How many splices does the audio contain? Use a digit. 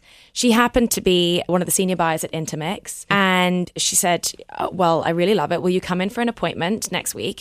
3